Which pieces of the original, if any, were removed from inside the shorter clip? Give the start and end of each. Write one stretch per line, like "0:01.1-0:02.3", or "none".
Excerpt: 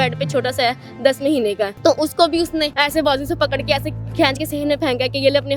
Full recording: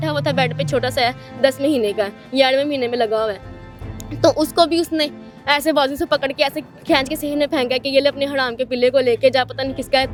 0:02.1-0:04.1
0:05.1-0:05.4